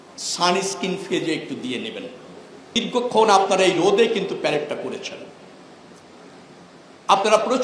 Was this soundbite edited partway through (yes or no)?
yes